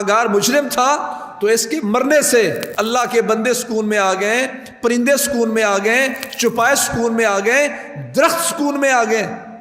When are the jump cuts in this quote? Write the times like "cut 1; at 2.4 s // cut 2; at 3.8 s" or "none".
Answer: cut 1; at 2.7 s